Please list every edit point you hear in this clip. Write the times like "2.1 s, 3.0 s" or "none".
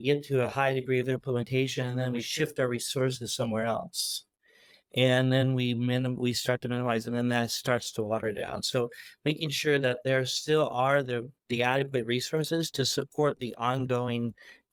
none